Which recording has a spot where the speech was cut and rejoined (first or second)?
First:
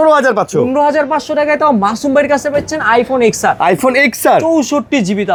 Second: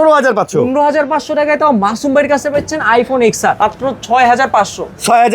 second